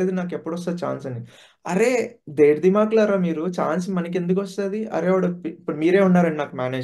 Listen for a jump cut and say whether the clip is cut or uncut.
uncut